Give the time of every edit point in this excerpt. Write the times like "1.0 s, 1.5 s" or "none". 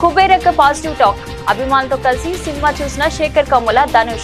none